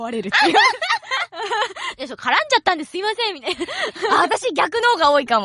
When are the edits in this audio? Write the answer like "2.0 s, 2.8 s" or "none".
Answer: none